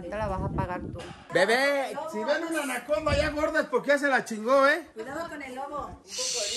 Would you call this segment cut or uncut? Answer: cut